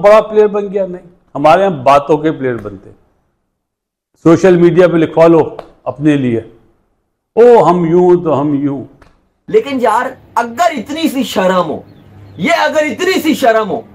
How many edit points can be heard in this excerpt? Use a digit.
1